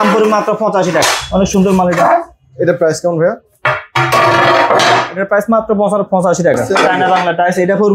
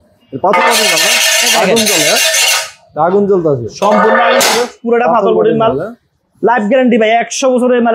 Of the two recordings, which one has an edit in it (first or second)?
first